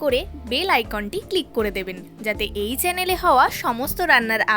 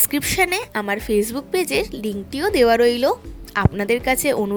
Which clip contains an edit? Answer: first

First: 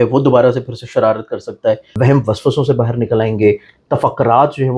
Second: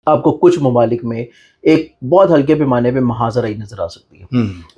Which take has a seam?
first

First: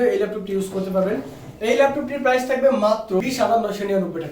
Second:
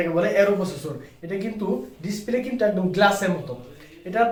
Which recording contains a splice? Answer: first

